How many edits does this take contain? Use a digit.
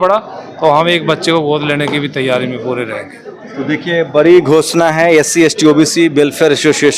0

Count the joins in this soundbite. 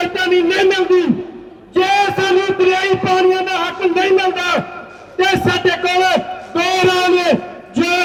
0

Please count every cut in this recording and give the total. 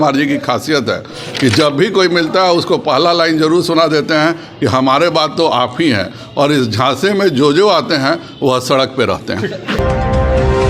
1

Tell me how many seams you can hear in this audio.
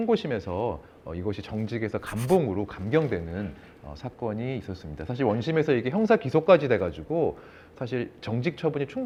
0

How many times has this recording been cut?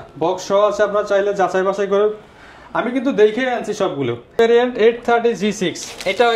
1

